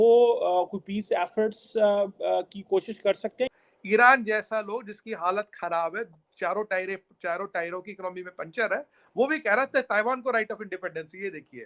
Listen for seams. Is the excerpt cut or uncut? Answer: cut